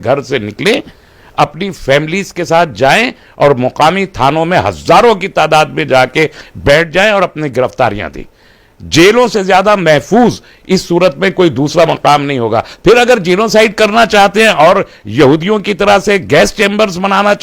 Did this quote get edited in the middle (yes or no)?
no